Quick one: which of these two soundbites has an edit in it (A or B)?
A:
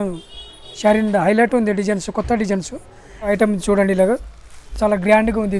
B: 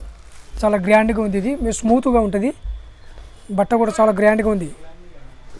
A